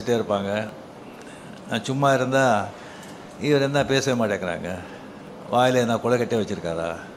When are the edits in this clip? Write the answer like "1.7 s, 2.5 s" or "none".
none